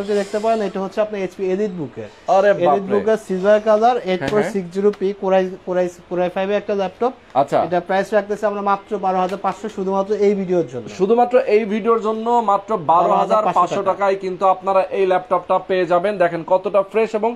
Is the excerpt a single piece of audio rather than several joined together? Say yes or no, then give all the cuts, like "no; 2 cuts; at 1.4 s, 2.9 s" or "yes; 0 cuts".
yes; 0 cuts